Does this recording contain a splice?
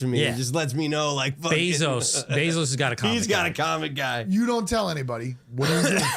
no; 0 cuts

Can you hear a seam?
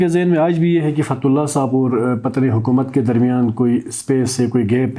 no; 0 cuts

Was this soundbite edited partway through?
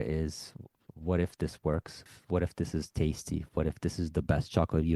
yes; 2 cuts; at 0.9 s, 2.1 s

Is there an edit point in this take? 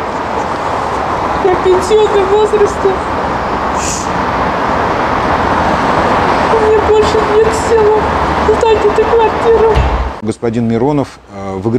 yes; 1 cut; at 10.2 s

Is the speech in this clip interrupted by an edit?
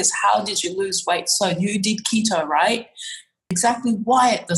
yes; 1 cut; at 3.5 s

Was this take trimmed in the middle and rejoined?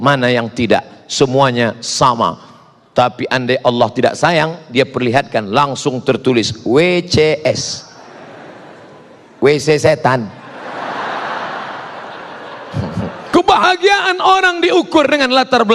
yes; 1 cut; at 13.3 s

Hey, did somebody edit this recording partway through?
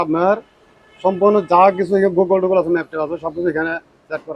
no; 0 cuts

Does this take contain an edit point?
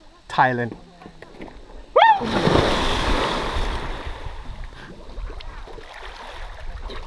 yes; 1 cut; at 3.3 s

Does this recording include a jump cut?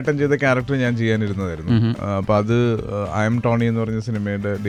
no; 0 cuts

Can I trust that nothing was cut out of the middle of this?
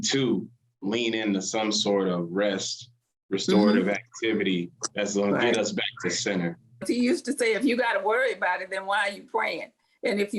no; 1 cut; at 6.7 s

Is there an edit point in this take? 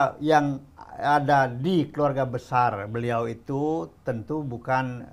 no; 0 cuts

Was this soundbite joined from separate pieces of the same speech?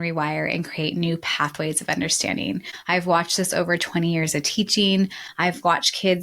yes; 2 cuts; at 2.7 s, 5.1 s

